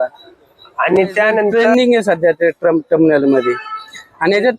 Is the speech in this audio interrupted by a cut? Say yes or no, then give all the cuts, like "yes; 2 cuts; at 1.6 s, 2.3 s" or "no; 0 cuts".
yes; 1 cut; at 1.5 s